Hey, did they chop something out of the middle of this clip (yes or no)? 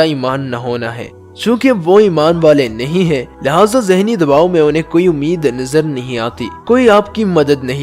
no